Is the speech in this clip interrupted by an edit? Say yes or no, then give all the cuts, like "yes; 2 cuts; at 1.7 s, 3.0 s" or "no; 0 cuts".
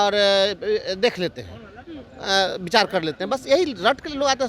no; 0 cuts